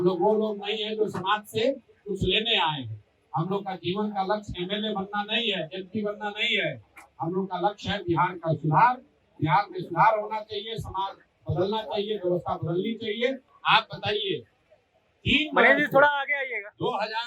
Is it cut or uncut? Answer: cut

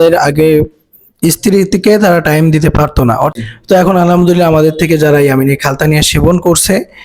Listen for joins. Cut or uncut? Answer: cut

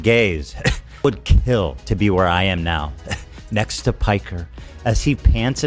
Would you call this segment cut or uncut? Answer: cut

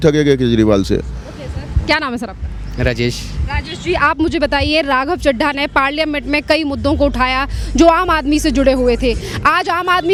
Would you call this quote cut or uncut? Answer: uncut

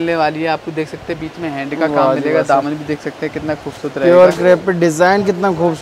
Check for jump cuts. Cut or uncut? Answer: uncut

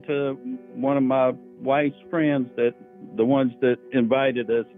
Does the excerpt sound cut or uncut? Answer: uncut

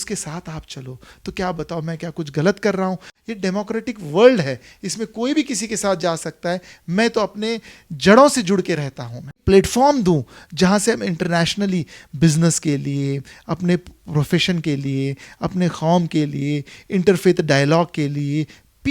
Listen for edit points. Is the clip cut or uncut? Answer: cut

